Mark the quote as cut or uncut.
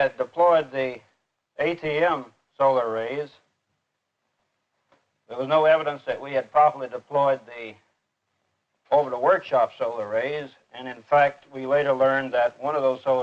cut